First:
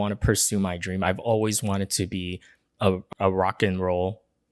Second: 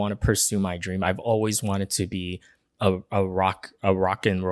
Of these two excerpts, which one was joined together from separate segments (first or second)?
first